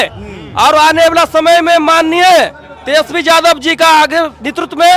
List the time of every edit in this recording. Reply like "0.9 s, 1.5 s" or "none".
none